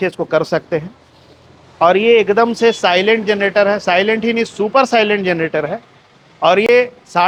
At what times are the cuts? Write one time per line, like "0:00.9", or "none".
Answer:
none